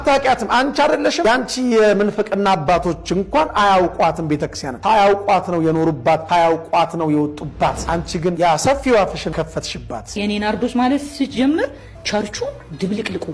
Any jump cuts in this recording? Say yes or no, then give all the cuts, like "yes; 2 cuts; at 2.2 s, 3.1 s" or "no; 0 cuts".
no; 0 cuts